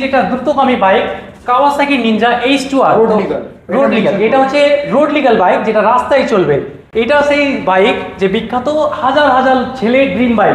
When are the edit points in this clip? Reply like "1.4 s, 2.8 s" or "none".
none

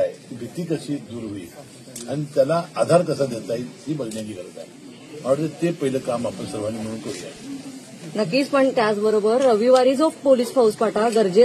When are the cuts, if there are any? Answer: none

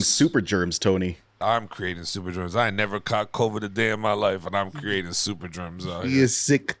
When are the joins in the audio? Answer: 1.2 s

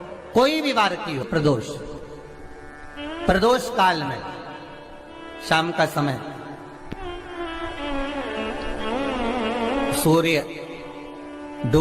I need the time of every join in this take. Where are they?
1.3 s

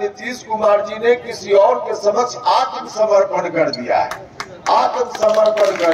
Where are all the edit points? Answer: none

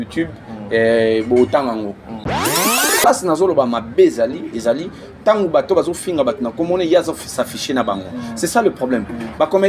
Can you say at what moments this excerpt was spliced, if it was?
2.4 s

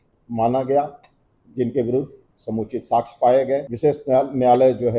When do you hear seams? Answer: 3.7 s

